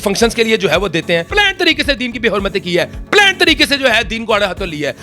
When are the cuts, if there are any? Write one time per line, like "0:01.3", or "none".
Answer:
0:01.3